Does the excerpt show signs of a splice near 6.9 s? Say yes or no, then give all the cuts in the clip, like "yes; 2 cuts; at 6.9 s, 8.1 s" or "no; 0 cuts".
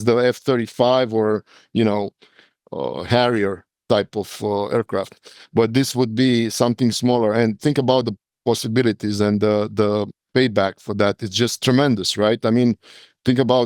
no; 2 cuts; at 8.2 s, 11.6 s